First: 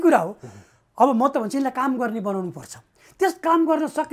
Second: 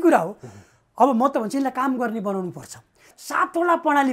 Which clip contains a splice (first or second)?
second